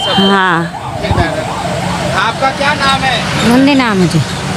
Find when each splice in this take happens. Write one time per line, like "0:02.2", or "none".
none